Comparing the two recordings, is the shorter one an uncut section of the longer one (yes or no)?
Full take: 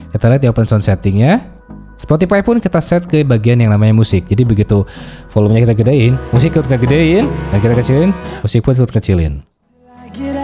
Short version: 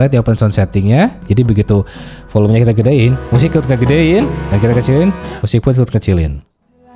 no